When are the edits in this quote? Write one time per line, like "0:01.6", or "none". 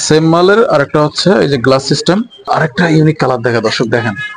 0:02.5